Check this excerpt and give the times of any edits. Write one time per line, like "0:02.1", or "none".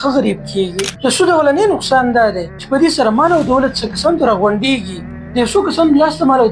0:00.9
0:02.5